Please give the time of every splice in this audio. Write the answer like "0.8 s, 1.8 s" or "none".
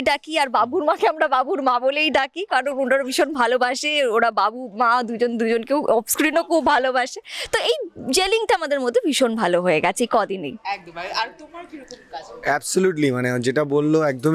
none

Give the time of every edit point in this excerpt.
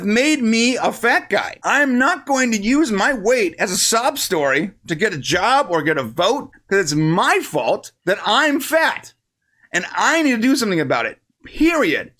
1.5 s, 6.5 s

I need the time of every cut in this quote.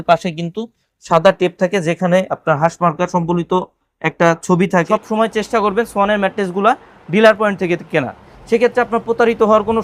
4.9 s

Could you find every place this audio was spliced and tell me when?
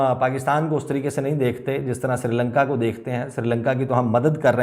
none

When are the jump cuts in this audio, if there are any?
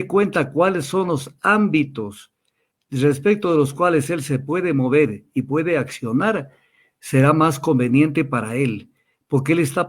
none

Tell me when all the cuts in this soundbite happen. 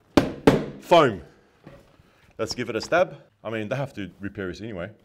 3.3 s

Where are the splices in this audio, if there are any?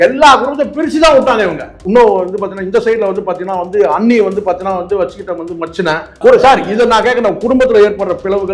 1.7 s, 6.1 s

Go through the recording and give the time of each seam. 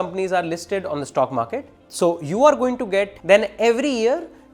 1.8 s, 3.2 s

